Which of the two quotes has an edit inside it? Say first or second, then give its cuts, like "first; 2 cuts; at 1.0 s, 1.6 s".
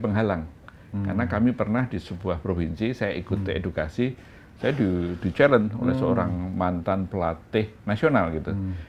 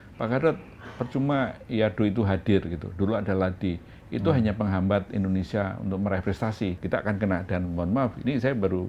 second; 1 cut; at 6.8 s